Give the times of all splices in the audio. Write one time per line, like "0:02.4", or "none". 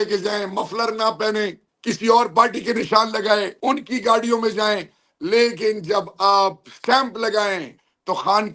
none